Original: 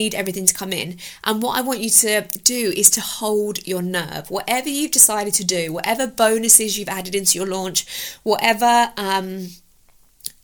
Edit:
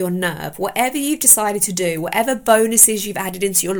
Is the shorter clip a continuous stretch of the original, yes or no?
yes